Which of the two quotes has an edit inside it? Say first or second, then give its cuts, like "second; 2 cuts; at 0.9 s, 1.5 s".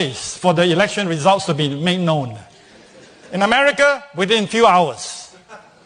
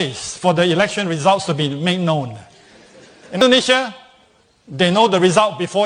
second; 1 cut; at 3.4 s